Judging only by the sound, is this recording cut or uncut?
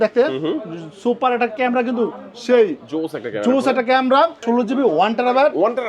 cut